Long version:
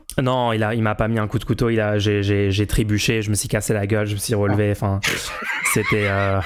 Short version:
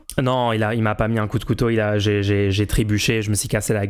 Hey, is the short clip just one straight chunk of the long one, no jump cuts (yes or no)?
yes